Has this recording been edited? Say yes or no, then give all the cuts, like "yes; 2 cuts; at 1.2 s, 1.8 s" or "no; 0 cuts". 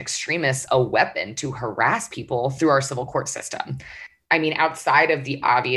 no; 0 cuts